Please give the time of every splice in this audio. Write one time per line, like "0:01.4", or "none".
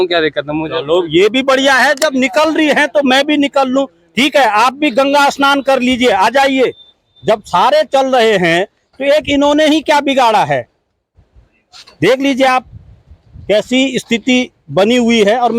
none